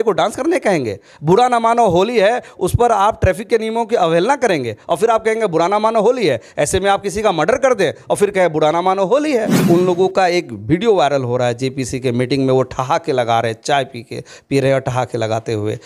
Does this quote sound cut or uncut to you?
cut